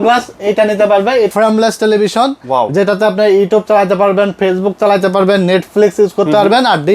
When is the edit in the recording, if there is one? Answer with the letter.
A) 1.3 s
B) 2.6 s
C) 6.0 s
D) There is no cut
A